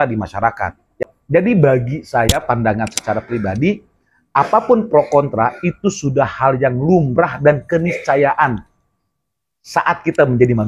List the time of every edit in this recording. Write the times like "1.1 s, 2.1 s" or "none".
1.0 s